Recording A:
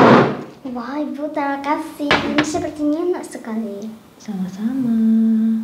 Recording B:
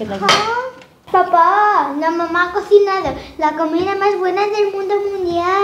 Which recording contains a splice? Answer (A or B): B